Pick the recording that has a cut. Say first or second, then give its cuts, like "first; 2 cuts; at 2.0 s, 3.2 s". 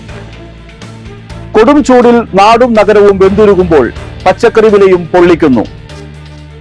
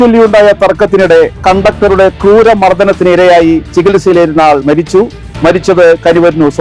first; 1 cut; at 1.0 s